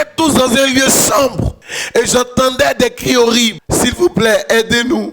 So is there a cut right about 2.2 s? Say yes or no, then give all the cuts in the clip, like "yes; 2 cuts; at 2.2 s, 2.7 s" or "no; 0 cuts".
no; 1 cut; at 3.6 s